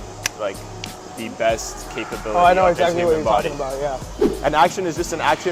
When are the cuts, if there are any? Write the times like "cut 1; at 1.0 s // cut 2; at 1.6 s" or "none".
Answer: cut 1; at 4.3 s